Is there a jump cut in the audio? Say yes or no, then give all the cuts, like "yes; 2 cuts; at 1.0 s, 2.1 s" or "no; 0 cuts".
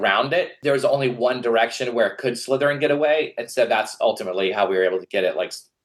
no; 0 cuts